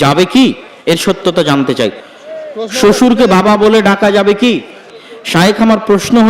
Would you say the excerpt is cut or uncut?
cut